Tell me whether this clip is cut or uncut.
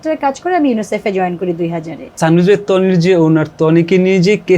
cut